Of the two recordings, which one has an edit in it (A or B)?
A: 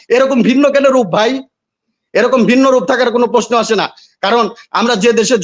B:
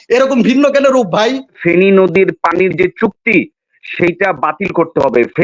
B